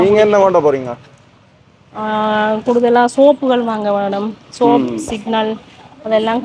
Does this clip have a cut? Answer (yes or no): no